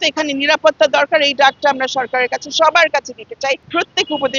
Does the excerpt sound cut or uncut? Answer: uncut